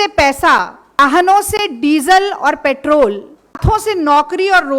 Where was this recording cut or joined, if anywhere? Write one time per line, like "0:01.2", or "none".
0:01.0
0:03.6